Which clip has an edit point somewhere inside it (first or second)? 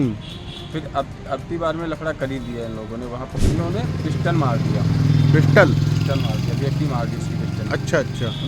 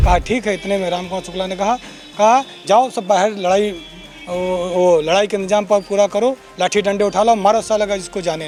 first